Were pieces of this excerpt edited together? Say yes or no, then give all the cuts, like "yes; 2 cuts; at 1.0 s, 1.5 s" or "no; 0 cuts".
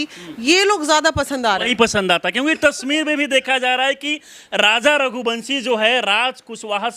no; 0 cuts